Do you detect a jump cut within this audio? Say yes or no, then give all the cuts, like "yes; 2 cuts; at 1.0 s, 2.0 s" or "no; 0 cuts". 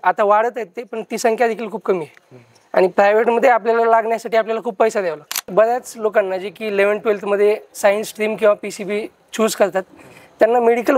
yes; 1 cut; at 5.5 s